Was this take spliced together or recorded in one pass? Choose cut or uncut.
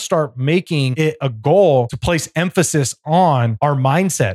cut